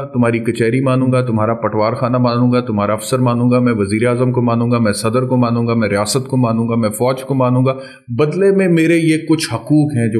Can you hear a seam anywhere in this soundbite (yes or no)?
no